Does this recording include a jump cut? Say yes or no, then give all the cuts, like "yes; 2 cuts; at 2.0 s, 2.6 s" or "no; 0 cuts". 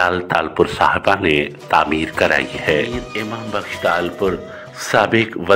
yes; 1 cut; at 3.0 s